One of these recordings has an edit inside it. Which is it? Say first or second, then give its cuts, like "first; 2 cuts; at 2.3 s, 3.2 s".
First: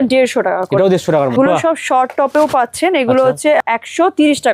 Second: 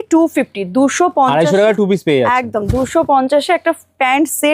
first; 2 cuts; at 1.3 s, 3.6 s